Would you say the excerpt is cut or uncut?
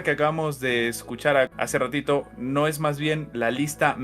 cut